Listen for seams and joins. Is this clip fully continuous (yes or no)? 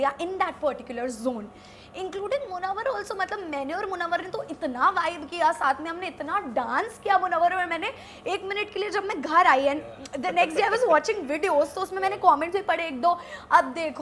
yes